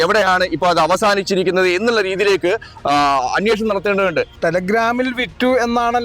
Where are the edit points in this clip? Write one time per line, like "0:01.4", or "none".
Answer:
0:04.3